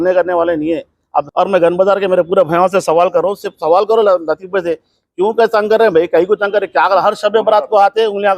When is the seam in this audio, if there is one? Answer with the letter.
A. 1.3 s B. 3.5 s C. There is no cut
A